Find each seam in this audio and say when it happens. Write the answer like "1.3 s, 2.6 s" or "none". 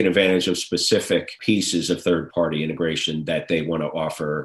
1.3 s, 2.3 s